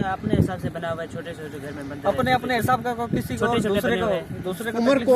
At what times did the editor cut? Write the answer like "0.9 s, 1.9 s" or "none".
none

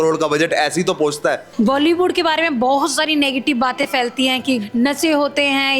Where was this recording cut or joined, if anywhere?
1.4 s, 4.7 s

